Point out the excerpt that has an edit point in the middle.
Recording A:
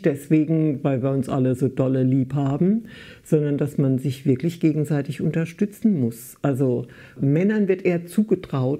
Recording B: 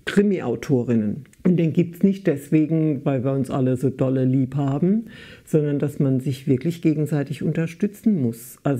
B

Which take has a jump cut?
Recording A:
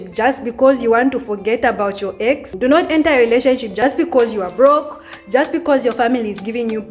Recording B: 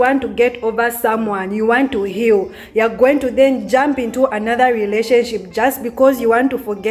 A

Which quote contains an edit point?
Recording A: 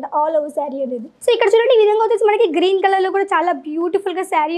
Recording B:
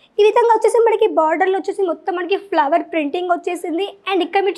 A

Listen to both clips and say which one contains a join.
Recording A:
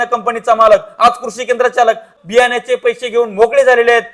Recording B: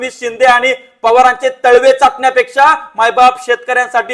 A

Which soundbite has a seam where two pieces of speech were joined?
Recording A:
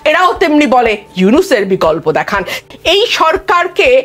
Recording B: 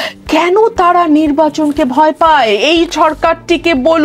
A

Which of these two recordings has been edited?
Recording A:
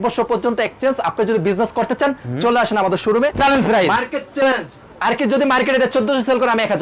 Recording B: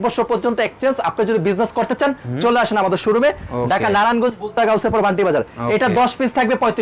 A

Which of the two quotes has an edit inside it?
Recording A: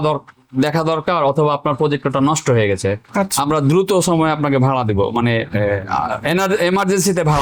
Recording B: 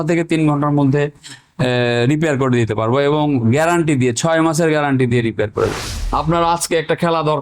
B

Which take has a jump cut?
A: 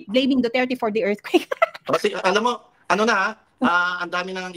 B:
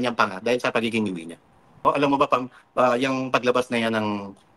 B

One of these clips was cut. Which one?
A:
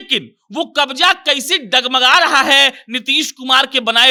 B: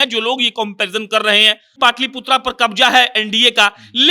B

